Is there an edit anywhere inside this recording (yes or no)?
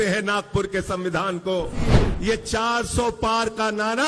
yes